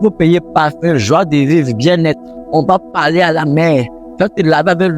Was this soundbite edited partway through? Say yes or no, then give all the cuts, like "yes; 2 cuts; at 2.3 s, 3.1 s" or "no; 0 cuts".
no; 0 cuts